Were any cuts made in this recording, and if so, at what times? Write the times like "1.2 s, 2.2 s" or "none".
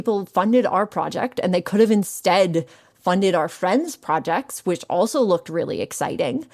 none